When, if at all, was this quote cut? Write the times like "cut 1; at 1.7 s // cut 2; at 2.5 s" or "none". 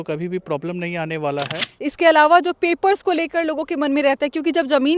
cut 1; at 1.6 s